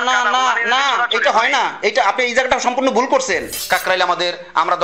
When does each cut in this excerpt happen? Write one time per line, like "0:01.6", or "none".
0:03.5